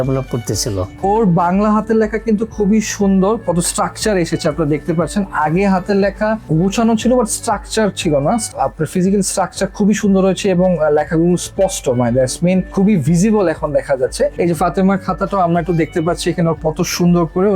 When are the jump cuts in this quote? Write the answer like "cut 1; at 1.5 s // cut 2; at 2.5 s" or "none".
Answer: cut 1; at 1.0 s // cut 2; at 8.5 s // cut 3; at 14.3 s